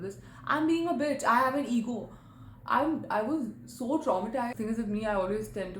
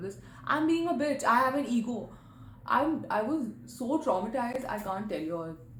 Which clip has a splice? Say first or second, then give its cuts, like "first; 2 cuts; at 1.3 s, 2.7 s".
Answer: first; 1 cut; at 4.5 s